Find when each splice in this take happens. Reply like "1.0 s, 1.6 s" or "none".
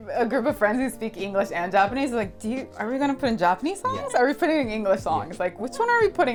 none